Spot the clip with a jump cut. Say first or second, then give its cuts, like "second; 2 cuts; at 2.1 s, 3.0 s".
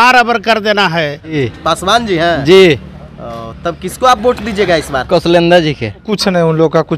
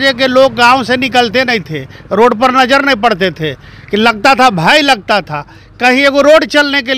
first; 2 cuts; at 1.4 s, 6.1 s